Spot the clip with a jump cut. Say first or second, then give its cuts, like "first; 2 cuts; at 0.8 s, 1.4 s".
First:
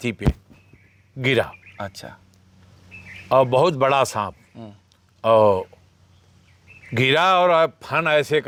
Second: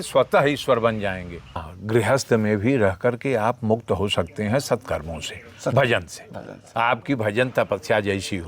second; 1 cut; at 1.7 s